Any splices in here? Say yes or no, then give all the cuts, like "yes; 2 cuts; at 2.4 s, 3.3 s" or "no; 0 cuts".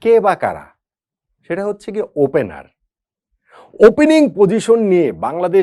no; 0 cuts